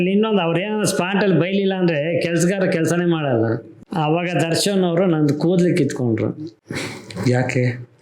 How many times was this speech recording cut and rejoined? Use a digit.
1